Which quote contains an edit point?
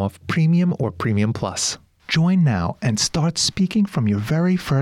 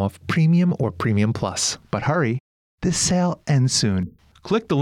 first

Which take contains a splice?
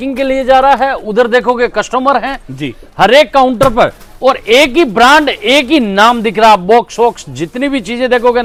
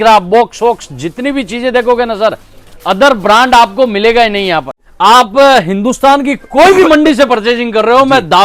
second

